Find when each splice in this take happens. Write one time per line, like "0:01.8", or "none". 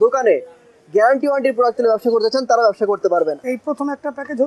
0:03.4